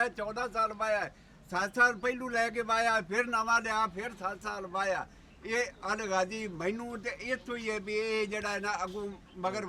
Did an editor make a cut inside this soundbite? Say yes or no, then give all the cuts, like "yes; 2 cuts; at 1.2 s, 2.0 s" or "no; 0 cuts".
no; 0 cuts